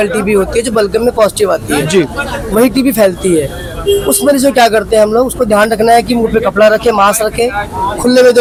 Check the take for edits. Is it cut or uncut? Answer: uncut